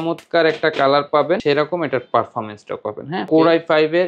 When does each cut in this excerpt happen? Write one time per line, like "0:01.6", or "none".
0:01.4
0:03.3